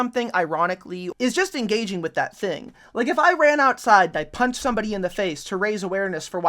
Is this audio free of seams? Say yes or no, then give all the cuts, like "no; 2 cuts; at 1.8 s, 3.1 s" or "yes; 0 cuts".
no; 1 cut; at 1.0 s